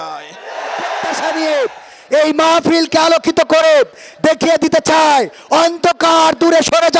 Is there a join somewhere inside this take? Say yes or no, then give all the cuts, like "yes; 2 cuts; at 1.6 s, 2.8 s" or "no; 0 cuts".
yes; 1 cut; at 1.2 s